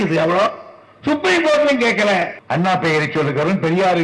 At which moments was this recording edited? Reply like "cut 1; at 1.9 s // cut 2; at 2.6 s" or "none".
cut 1; at 2.4 s